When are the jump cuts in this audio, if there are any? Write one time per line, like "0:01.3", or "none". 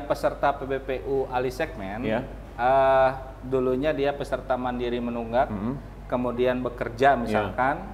none